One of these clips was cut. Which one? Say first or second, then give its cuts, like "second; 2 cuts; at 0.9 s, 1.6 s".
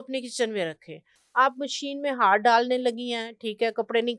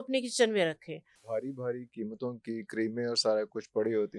second; 1 cut; at 1.2 s